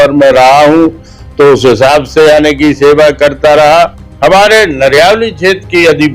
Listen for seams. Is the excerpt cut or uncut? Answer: cut